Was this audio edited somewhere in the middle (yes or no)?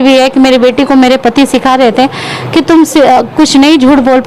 no